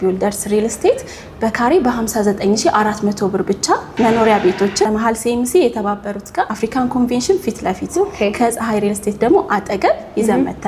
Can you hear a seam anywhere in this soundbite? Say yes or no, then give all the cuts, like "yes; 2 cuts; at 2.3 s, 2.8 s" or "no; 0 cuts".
yes; 1 cut; at 6.5 s